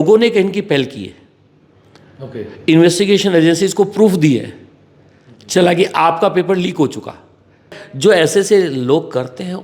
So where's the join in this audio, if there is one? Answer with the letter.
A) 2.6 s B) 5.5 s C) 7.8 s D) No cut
C